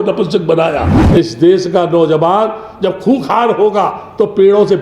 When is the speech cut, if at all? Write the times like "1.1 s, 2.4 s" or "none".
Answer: 1.0 s